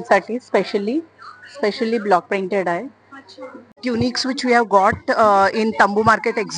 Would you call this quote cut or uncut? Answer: cut